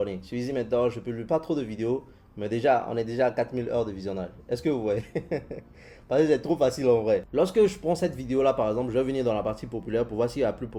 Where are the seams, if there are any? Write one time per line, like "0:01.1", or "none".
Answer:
0:07.3